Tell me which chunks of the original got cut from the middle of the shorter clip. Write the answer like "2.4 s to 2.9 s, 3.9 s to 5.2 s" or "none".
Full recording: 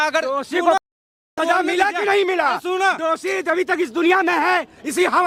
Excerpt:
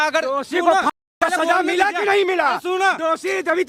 none